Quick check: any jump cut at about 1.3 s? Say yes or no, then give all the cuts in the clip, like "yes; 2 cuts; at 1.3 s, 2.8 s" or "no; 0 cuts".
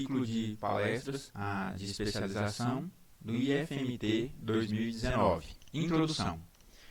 yes; 2 cuts; at 1.3 s, 5.6 s